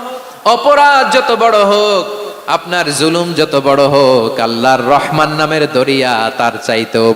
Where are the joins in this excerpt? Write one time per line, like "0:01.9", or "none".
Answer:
none